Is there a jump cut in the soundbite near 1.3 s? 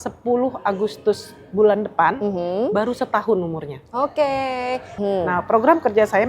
no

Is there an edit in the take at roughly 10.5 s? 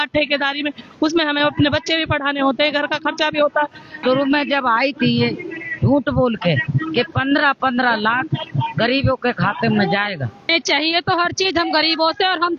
yes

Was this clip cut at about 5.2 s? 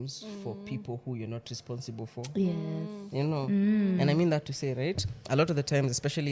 no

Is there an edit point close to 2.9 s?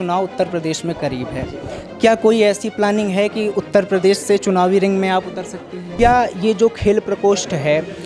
no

